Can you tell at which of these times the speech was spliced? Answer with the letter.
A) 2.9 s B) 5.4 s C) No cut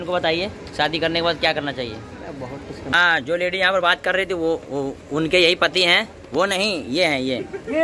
A